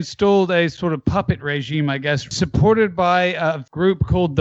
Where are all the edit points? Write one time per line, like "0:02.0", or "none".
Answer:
0:02.3
0:03.6